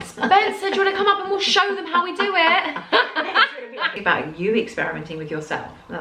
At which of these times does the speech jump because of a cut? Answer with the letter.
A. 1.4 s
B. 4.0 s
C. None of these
B